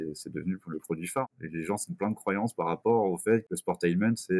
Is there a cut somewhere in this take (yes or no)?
yes